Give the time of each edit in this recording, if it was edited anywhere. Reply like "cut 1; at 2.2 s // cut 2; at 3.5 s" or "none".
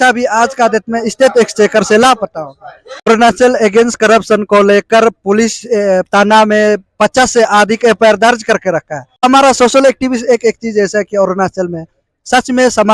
cut 1; at 3.1 s // cut 2; at 9.2 s

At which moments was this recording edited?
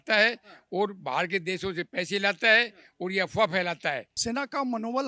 cut 1; at 4.1 s

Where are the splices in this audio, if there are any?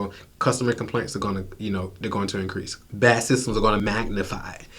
cut 1; at 2.8 s // cut 2; at 3.8 s

